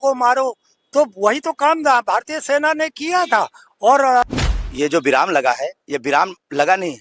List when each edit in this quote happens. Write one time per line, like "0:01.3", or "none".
0:01.2
0:04.2